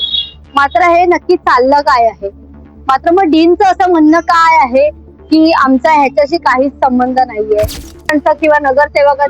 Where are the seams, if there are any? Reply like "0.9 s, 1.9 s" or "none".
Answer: 7.9 s